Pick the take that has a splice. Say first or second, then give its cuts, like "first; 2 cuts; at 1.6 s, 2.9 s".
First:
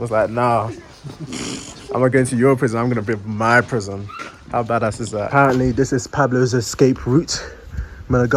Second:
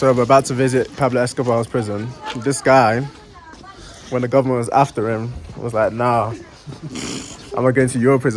first; 1 cut; at 5.3 s